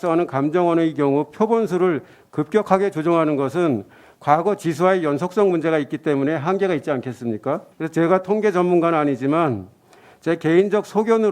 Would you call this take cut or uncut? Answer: cut